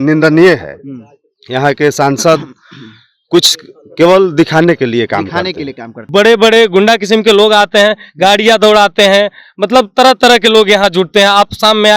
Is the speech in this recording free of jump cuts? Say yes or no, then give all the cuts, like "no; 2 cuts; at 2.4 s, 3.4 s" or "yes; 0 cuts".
no; 1 cut; at 6.0 s